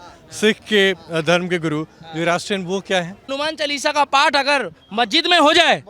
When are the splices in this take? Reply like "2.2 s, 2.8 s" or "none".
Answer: 3.3 s